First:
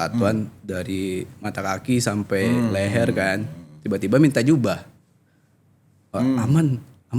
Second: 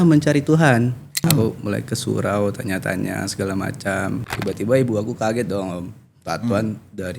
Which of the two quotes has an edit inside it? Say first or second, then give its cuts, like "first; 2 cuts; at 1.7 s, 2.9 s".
second; 2 cuts; at 1.2 s, 4.2 s